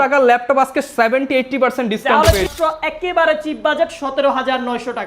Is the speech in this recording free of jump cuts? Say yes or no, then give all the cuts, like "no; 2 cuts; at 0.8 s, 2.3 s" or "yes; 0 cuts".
no; 1 cut; at 2.5 s